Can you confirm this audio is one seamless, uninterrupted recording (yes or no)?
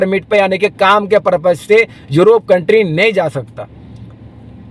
yes